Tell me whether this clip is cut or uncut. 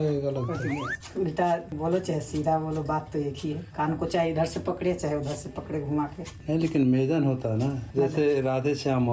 cut